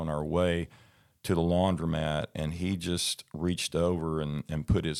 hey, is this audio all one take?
yes; 0 cuts

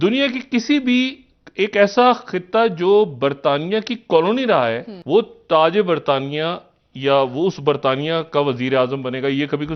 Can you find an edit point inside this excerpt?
yes; 1 cut; at 4.9 s

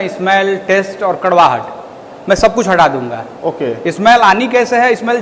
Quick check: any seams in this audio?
no; 0 cuts

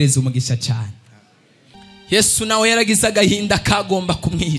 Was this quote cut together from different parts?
yes; 1 cut; at 1.7 s

